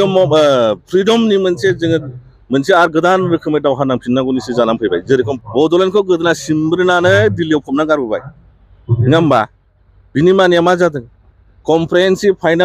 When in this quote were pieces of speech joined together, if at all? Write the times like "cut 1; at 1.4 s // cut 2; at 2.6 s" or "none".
cut 1; at 5.4 s